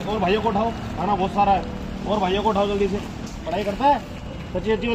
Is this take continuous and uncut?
no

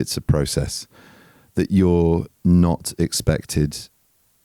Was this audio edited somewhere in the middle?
no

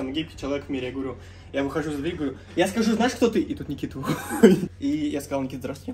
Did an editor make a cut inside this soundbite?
no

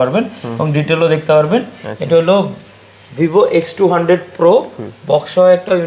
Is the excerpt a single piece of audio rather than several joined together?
yes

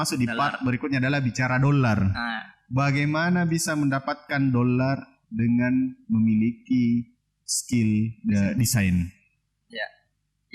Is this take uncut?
yes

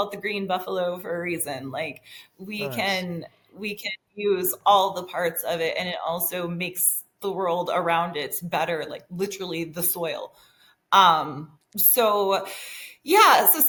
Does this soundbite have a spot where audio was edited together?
no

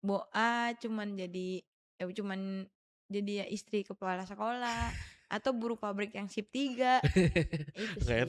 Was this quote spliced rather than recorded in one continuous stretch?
no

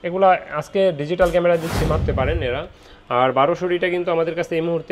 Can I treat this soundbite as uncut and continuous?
no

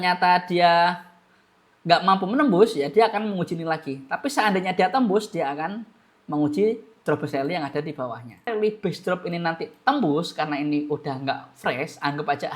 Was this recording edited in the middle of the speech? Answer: yes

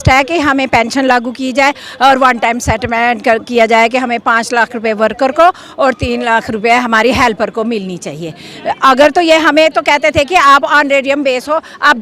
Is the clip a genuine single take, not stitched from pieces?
yes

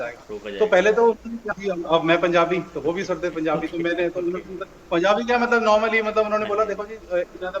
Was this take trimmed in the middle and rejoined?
yes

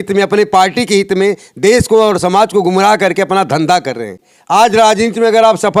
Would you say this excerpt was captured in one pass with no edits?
no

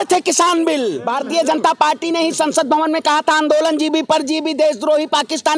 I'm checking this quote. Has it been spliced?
yes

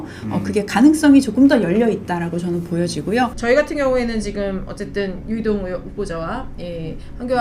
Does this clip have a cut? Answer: yes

